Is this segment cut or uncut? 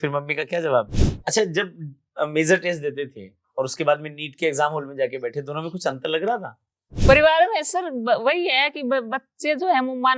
cut